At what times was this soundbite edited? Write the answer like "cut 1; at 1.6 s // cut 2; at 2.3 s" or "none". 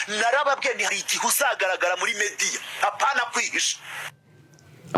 none